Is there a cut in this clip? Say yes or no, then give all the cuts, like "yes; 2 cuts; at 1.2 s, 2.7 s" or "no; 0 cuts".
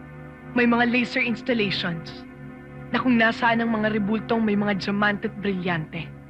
no; 0 cuts